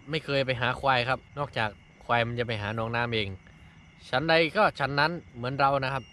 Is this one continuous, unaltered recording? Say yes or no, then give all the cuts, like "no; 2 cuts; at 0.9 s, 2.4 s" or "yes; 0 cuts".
no; 1 cut; at 1.3 s